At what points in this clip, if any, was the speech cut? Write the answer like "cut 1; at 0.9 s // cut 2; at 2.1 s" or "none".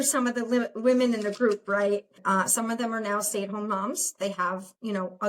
cut 1; at 2.2 s